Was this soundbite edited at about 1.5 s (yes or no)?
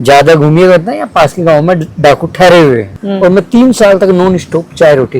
no